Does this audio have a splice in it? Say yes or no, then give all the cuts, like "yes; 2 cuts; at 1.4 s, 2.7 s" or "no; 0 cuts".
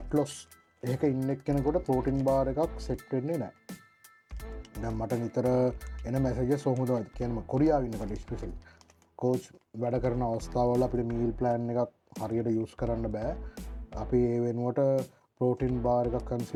no; 0 cuts